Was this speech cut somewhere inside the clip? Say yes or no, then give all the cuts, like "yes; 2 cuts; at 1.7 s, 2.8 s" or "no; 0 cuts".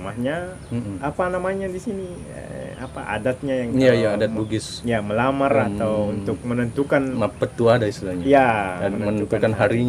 no; 0 cuts